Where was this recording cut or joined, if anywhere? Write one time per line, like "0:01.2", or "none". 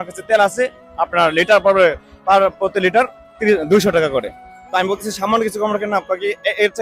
none